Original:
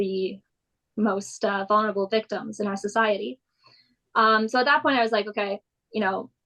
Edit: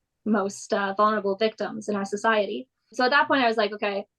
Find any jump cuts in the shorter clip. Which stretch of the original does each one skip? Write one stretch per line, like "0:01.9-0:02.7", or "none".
0:03.7-0:04.5